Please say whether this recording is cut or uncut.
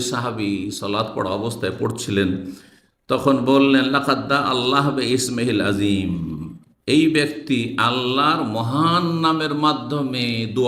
uncut